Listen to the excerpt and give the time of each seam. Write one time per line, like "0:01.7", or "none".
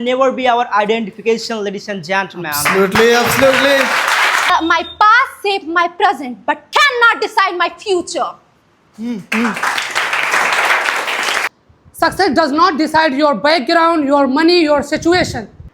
0:04.5
0:11.5